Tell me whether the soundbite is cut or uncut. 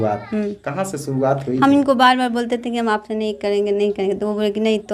uncut